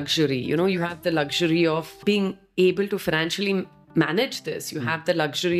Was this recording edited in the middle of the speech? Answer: yes; 1 cut; at 2.0 s

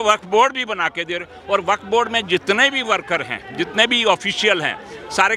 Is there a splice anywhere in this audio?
no; 0 cuts

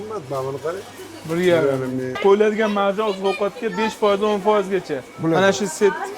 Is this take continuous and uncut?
no; 1 cut; at 2.2 s

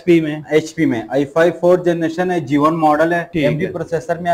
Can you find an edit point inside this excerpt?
yes; 1 cut; at 3.2 s

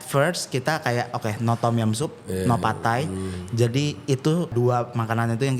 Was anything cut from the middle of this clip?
yes; 1 cut; at 4.5 s

